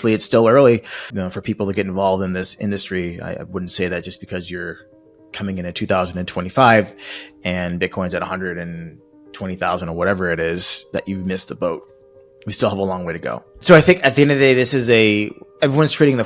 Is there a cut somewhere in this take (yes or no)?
yes